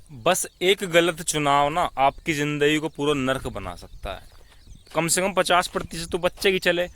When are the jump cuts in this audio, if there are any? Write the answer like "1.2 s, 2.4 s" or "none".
4.7 s